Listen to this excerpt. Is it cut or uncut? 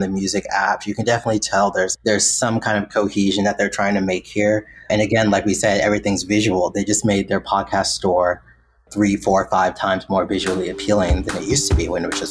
cut